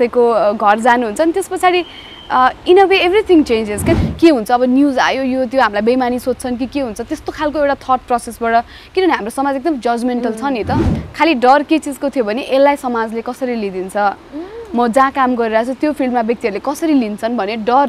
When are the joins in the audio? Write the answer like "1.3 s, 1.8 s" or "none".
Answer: 3.9 s, 10.9 s

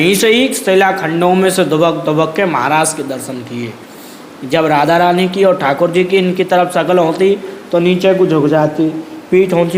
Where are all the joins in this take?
none

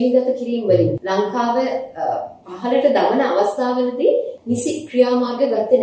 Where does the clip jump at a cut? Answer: 1.0 s, 4.3 s

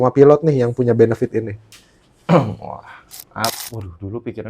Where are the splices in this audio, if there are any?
3.6 s

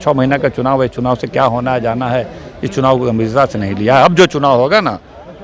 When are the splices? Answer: none

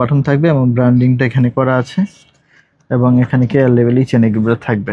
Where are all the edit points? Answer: none

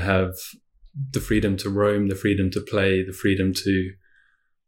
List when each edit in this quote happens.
0.9 s

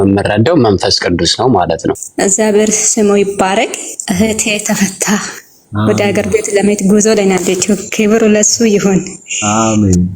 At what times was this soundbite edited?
2.1 s

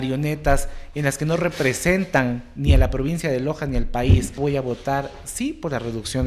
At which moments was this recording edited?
4.4 s

